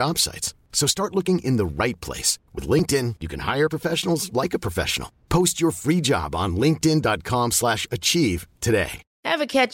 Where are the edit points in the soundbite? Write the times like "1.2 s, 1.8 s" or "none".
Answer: none